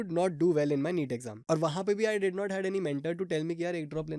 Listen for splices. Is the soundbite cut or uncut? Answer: cut